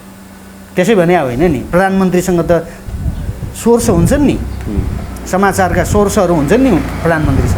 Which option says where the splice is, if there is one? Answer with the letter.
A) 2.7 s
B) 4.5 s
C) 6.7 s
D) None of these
D